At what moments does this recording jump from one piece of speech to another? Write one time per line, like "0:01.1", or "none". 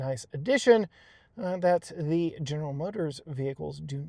none